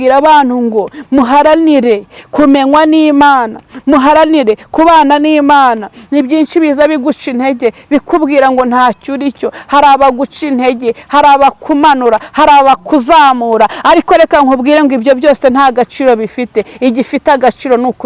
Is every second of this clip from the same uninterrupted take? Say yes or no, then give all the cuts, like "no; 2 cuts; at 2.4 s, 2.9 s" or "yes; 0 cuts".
yes; 0 cuts